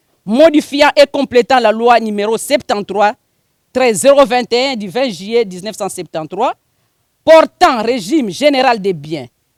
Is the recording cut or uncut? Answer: uncut